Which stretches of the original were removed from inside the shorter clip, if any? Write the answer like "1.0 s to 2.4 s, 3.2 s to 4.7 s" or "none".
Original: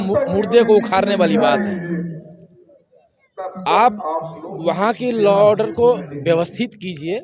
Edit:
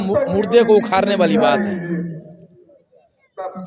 none